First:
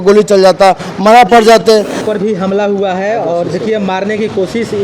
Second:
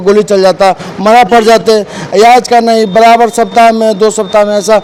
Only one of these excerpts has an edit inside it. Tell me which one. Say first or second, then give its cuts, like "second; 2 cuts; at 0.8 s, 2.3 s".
first; 1 cut; at 2.0 s